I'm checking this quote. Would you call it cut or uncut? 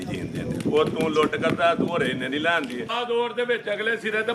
cut